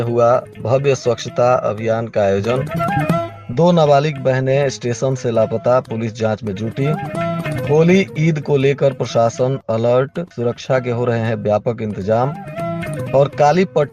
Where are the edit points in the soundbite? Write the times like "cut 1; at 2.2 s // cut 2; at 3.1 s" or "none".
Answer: none